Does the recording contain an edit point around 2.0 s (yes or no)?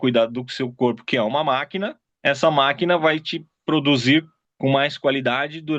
yes